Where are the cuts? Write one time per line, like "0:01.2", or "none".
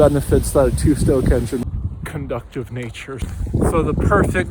0:01.6
0:03.3